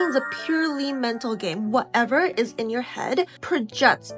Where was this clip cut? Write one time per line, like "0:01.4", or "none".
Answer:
none

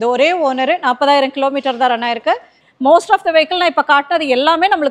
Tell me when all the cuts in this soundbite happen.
0:02.6

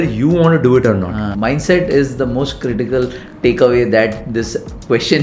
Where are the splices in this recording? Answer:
0:01.2

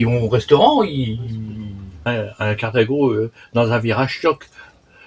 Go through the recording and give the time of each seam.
none

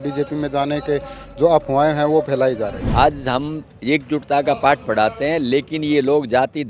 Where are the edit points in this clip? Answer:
0:02.8

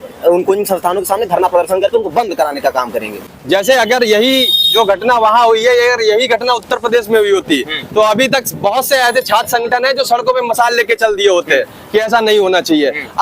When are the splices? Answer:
0:03.2

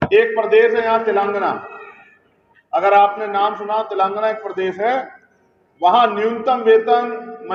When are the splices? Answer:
none

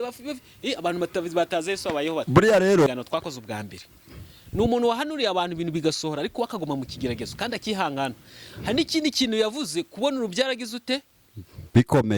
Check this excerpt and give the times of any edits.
0:02.9

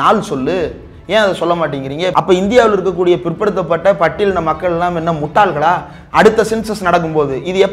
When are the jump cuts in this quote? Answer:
0:02.1

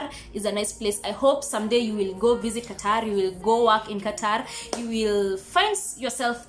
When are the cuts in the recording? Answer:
none

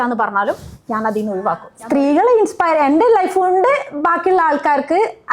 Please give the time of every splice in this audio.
0:01.7

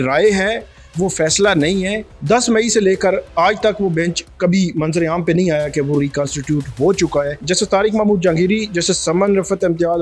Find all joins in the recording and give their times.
0:02.1
0:07.4

